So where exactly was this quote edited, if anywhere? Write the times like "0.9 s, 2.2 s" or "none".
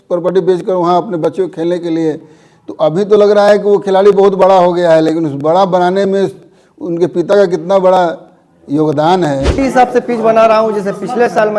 9.5 s